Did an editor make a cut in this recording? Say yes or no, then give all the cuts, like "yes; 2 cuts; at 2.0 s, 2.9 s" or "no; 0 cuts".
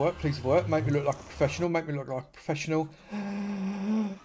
no; 0 cuts